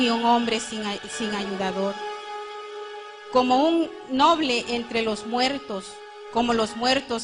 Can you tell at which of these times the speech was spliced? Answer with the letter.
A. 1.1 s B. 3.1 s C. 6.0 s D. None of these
D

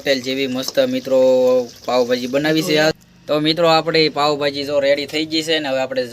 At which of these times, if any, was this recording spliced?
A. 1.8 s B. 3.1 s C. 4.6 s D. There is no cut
B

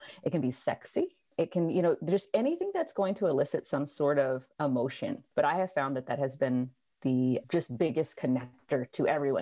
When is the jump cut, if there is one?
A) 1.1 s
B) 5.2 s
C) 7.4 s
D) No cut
B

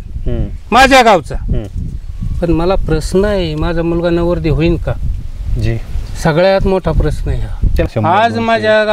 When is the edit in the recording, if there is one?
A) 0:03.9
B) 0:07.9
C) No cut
B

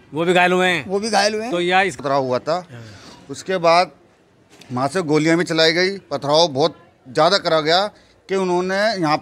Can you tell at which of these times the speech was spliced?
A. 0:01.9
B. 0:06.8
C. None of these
A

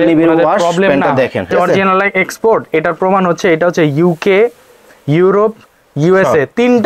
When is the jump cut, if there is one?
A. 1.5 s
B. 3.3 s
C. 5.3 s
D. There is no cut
A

